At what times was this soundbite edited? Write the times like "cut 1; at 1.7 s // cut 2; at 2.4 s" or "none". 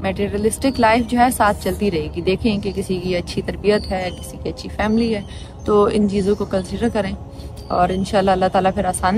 none